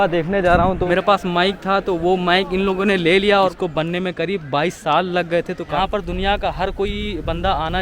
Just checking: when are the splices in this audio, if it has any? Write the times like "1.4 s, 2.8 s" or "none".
0.8 s, 3.5 s, 5.7 s